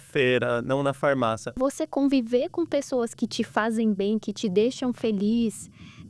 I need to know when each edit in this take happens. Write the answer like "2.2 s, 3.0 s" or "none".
1.6 s

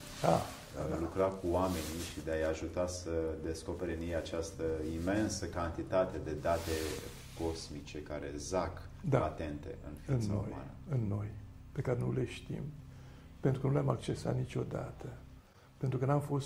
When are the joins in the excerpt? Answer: none

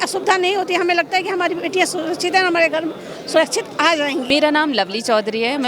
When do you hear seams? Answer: 4.3 s

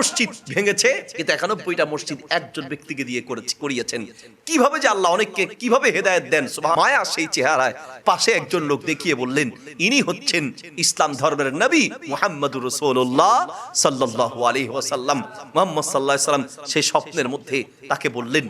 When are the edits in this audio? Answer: 6.8 s

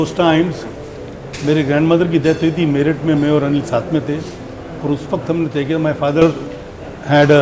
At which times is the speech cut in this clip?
none

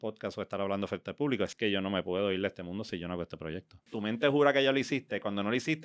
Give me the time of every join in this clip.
1.5 s, 3.9 s

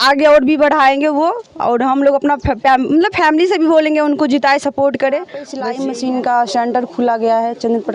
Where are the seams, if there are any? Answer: 5.6 s

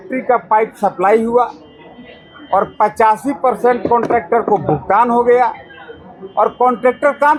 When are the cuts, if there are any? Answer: none

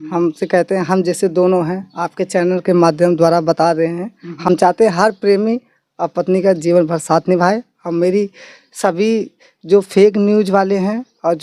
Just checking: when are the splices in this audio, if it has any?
none

